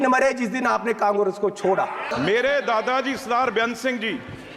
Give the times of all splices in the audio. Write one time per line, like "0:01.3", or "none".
0:02.1